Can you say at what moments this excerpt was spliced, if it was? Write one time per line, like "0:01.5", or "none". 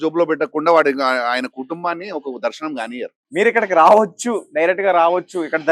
0:03.2